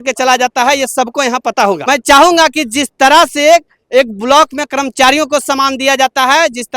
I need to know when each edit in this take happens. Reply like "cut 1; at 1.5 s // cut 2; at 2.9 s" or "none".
cut 1; at 1.8 s